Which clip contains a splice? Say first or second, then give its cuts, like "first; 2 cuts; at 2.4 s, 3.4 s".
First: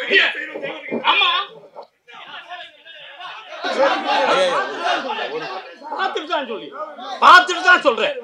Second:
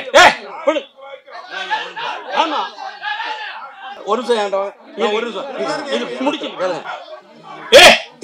second; 2 cuts; at 4.0 s, 6.9 s